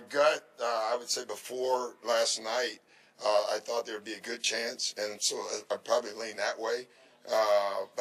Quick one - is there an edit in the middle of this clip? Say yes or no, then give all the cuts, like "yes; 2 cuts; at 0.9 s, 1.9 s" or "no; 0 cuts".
no; 0 cuts